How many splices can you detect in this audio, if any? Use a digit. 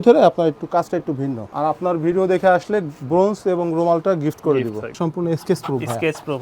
2